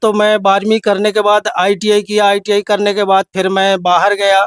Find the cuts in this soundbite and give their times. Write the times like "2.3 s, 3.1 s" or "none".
none